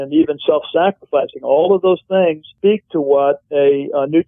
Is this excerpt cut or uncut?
cut